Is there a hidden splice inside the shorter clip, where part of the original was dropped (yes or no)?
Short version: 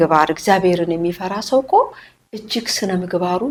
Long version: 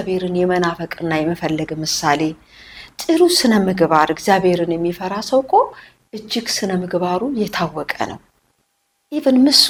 no